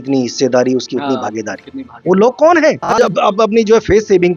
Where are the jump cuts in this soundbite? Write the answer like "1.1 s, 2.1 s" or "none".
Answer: 3.0 s